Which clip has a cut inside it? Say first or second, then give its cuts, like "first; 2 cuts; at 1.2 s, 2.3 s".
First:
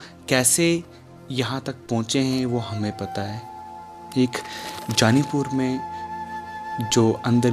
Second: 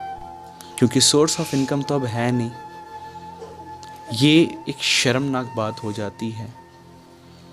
second; 2 cuts; at 2.5 s, 4.0 s